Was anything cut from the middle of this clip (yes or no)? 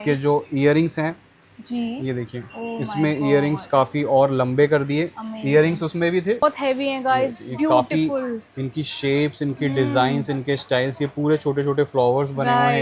yes